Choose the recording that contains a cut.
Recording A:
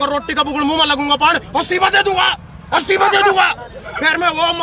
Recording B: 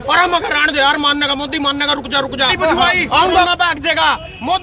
B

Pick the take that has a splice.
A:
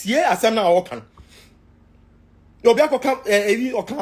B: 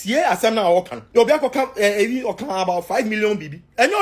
B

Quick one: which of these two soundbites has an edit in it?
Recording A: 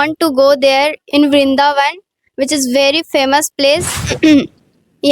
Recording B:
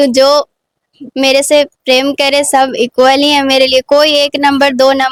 A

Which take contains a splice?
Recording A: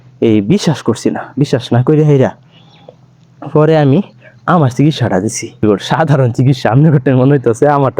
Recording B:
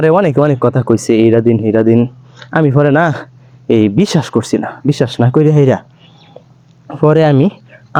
A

